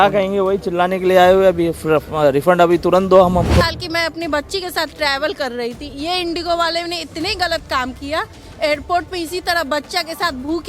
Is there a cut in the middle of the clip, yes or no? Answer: yes